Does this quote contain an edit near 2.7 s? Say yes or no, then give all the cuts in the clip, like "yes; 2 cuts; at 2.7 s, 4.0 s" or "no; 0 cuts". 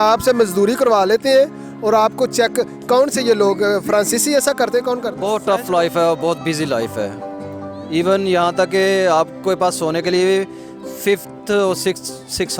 no; 1 cut; at 5.1 s